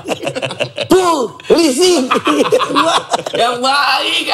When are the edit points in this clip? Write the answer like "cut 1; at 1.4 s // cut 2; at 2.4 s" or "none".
none